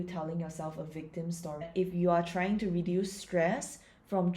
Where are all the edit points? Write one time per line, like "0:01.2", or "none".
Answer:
0:01.7